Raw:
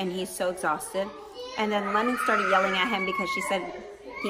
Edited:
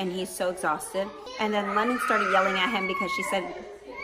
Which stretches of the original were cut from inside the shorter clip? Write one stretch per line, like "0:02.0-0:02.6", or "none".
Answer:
0:01.2-0:01.4